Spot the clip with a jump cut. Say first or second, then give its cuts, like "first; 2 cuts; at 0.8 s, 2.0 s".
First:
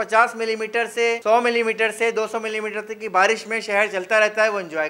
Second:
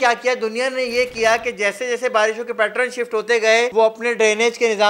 second; 1 cut; at 3.7 s